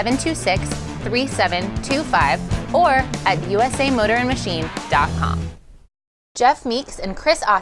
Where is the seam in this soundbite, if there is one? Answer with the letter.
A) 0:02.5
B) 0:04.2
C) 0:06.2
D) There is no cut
C